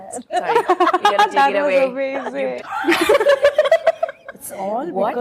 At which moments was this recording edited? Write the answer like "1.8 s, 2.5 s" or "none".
2.5 s